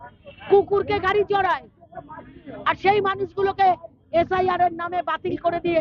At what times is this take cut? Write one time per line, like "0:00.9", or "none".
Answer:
none